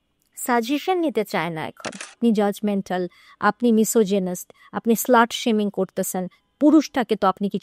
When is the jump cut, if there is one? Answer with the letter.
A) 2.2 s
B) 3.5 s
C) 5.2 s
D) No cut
A